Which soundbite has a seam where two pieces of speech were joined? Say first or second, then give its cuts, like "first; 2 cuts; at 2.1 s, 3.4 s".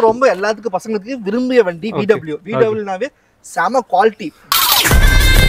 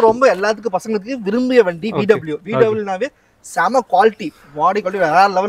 first; 1 cut; at 4.5 s